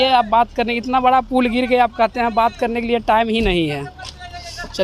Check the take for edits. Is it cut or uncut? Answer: uncut